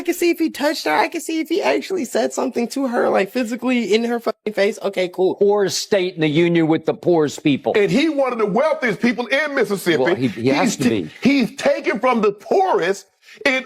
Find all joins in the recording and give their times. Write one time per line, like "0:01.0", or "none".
0:05.3

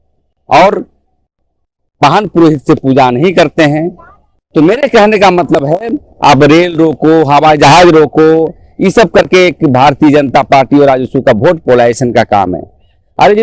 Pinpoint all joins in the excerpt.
none

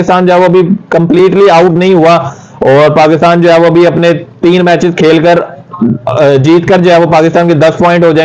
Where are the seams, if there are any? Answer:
none

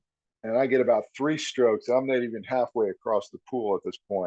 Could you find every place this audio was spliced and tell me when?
none

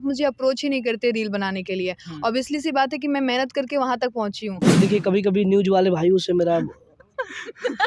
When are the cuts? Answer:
0:04.6

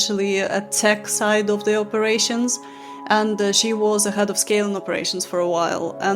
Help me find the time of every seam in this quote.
none

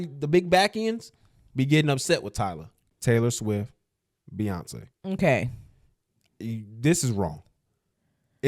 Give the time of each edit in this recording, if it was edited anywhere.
0:02.9

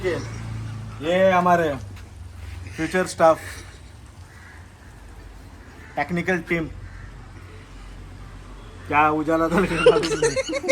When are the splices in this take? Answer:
none

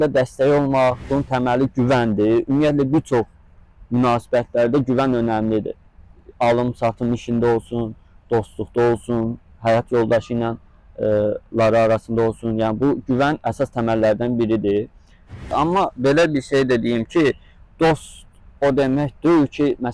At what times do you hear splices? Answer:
0:01.0
0:15.4

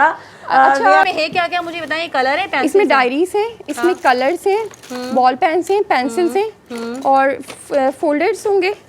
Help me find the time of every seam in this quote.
0:01.0

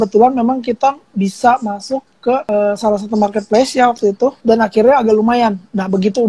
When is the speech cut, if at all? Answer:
0:02.4
0:04.4

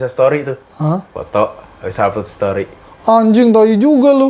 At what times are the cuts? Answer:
0:01.2

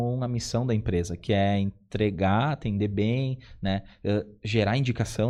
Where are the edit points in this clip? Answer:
none

